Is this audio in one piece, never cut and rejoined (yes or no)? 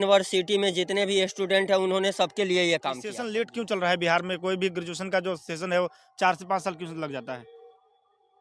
no